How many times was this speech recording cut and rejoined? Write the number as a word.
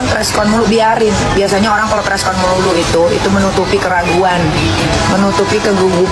zero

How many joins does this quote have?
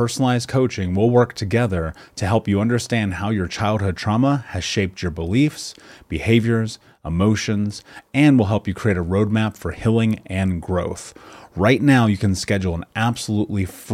zero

